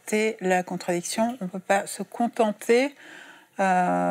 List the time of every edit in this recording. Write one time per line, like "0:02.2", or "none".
none